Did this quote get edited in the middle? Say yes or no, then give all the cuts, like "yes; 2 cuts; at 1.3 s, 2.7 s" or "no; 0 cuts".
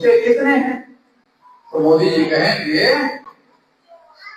no; 0 cuts